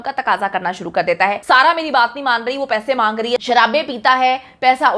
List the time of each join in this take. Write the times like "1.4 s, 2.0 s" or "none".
1.4 s, 3.4 s